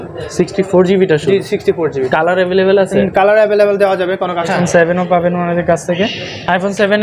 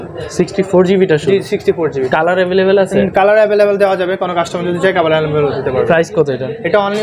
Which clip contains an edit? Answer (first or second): first